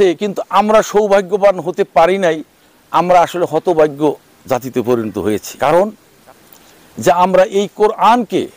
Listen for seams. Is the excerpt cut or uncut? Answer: cut